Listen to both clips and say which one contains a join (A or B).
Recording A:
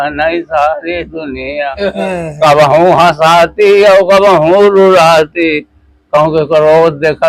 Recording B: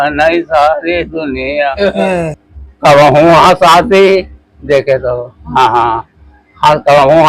B